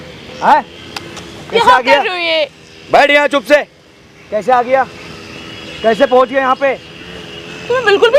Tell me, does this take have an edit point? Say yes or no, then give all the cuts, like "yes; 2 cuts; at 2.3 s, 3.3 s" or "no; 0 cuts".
no; 0 cuts